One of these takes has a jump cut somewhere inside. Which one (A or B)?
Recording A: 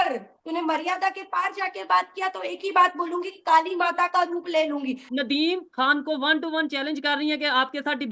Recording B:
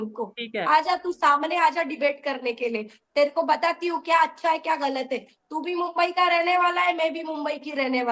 A